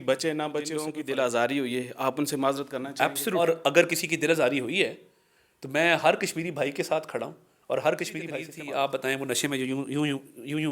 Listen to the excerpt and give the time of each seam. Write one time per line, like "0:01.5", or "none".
0:01.0
0:03.4
0:08.5